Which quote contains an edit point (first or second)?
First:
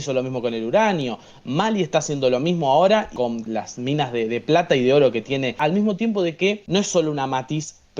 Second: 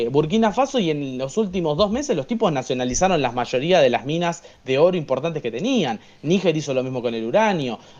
first